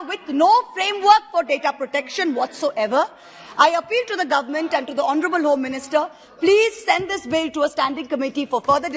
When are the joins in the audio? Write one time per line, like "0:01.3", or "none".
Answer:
none